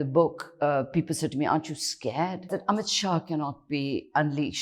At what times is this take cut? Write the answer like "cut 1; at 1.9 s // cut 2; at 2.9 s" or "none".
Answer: cut 1; at 2.5 s